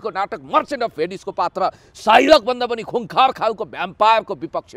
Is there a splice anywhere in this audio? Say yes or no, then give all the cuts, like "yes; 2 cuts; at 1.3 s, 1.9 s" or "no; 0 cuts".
no; 0 cuts